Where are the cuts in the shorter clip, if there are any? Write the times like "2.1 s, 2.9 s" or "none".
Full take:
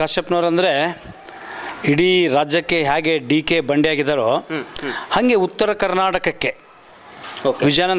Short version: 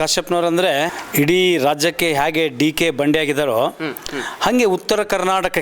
1.0 s